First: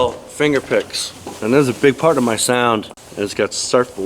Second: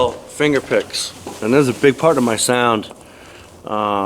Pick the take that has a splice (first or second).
first